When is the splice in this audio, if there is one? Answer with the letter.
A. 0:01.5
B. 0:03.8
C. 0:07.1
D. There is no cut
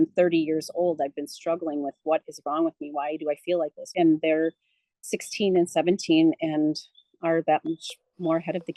B